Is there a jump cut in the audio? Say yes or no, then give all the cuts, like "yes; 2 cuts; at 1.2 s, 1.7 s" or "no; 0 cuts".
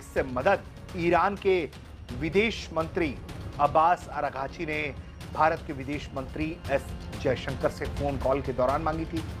no; 0 cuts